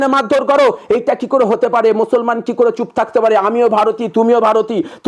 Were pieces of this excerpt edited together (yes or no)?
no